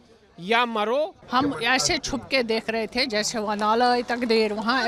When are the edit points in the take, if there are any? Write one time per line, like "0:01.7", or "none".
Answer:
0:01.2